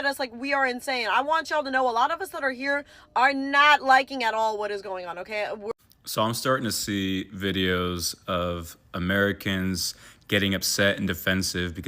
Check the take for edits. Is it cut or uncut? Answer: cut